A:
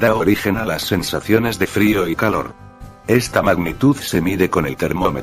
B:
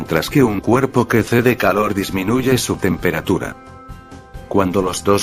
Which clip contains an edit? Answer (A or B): A